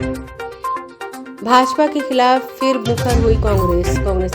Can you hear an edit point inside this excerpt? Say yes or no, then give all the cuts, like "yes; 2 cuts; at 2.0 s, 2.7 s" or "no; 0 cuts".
no; 0 cuts